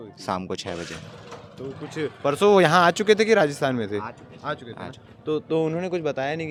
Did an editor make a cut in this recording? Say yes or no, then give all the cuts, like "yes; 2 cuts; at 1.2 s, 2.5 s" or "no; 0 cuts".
no; 0 cuts